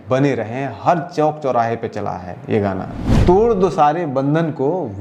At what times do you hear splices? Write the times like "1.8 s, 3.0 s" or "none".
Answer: 3.1 s